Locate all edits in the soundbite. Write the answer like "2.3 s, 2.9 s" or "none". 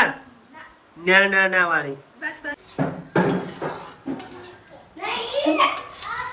2.5 s